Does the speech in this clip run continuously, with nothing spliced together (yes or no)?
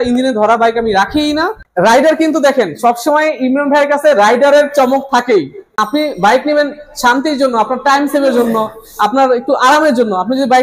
no